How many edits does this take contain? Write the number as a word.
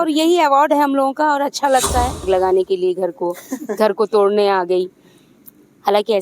one